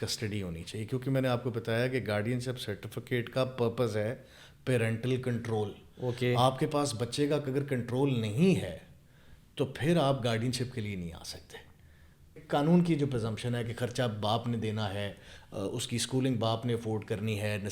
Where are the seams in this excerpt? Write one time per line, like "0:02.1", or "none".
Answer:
0:12.4